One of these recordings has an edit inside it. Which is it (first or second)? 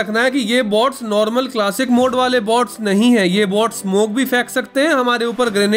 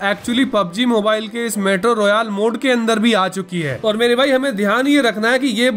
second